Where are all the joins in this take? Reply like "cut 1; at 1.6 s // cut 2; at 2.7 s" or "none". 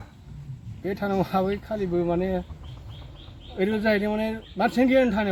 none

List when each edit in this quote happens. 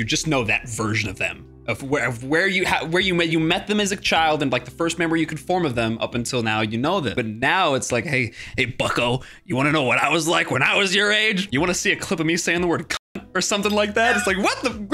cut 1; at 7.2 s // cut 2; at 11.5 s

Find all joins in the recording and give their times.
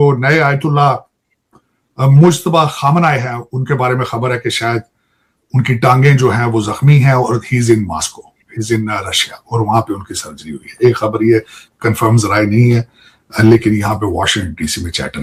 none

